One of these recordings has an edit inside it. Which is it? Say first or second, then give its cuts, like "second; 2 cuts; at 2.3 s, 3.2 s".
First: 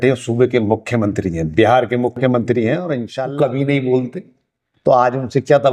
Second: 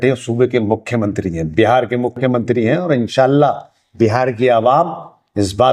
first; 1 cut; at 3.1 s